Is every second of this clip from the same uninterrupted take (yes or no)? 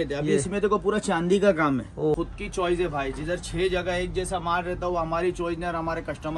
no